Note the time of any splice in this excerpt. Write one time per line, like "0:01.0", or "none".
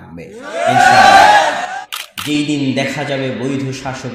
0:01.7